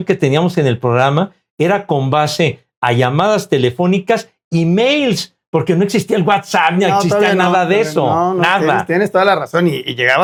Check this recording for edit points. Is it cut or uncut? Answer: uncut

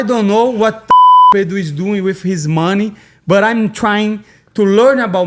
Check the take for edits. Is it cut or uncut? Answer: uncut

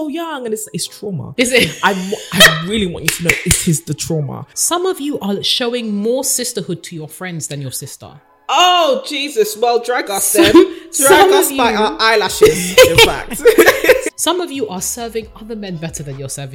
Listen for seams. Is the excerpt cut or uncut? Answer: cut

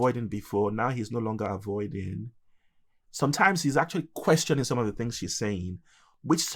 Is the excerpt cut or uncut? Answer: uncut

